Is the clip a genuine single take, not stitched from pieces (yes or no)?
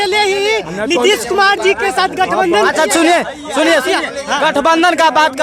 yes